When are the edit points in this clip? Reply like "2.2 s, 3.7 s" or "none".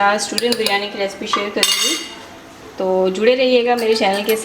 none